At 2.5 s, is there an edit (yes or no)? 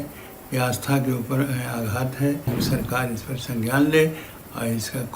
yes